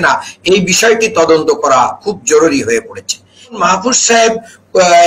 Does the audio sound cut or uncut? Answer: cut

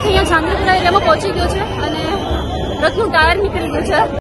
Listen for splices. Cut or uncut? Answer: uncut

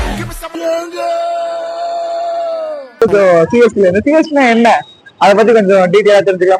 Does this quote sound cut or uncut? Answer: cut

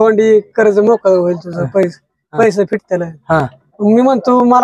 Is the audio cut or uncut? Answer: uncut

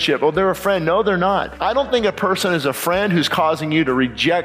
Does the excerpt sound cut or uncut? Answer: cut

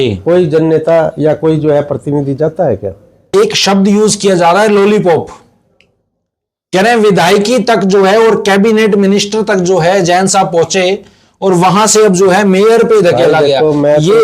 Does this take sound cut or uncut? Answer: cut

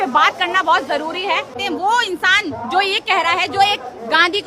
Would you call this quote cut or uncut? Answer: cut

